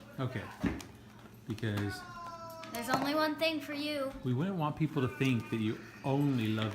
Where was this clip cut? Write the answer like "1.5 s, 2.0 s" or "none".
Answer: 4.5 s